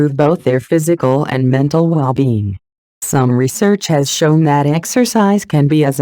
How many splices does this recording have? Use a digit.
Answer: 1